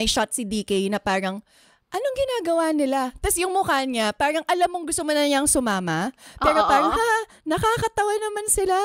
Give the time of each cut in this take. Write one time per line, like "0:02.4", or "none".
none